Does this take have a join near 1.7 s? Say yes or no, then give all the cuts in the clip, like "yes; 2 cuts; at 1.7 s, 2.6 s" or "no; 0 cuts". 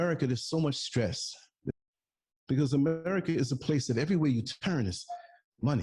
yes; 1 cut; at 1.7 s